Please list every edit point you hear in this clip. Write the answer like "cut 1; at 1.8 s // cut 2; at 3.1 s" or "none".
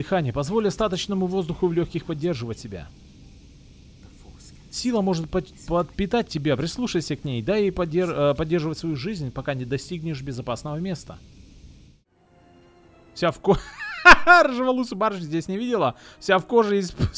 cut 1; at 12.1 s